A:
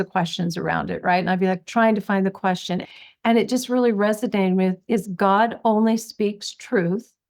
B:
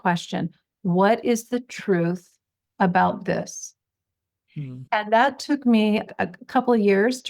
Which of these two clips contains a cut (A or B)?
A